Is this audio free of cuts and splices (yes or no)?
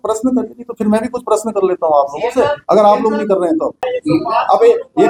yes